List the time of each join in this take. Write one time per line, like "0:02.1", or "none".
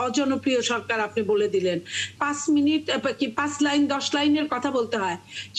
0:02.2

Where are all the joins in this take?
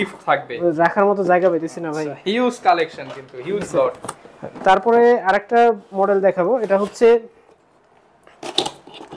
none

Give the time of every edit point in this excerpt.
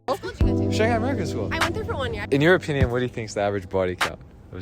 0:02.2

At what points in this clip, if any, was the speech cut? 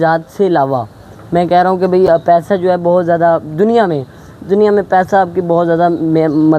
none

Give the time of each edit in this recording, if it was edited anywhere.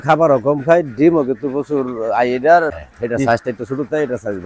0:02.7

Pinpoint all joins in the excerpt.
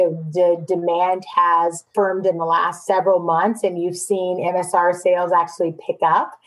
0:01.8
0:02.8

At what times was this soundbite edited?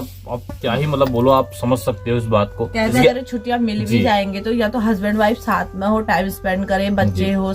0:02.9

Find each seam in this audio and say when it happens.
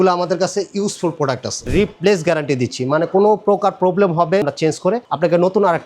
0:01.7
0:04.4

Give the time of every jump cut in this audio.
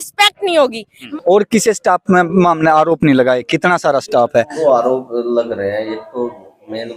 0:01.1
0:04.5

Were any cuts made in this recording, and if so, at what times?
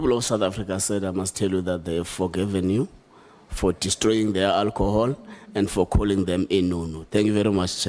none

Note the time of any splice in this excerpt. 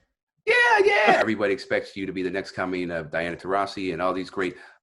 0:01.2

